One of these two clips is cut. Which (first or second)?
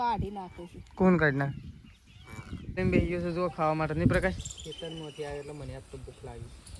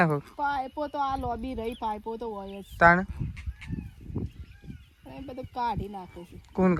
first